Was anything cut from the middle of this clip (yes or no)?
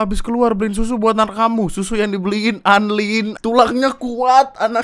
yes